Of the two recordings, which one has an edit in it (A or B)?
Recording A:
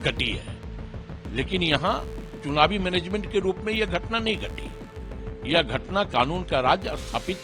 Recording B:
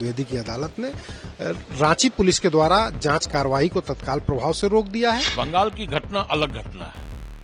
B